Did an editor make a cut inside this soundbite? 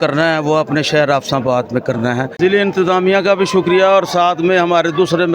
yes; 1 cut; at 2.3 s

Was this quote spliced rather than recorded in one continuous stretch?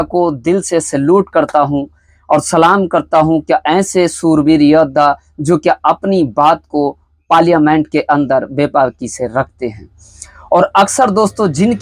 no; 0 cuts

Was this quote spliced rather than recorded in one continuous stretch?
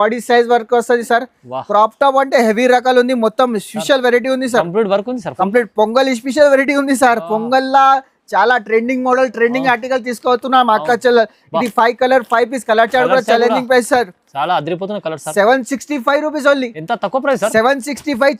no; 0 cuts

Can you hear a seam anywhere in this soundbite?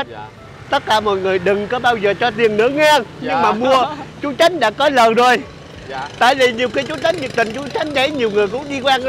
no; 0 cuts

